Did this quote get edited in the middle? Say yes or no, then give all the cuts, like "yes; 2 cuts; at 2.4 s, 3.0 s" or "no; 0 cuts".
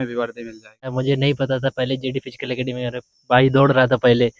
yes; 1 cut; at 1.0 s